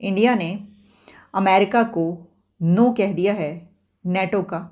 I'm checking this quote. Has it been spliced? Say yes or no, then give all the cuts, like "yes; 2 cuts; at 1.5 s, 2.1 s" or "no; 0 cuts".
no; 0 cuts